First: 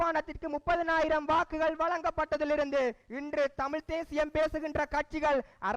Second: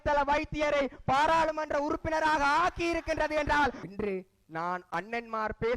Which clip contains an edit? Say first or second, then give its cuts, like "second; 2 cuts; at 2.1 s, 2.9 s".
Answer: second; 1 cut; at 3.8 s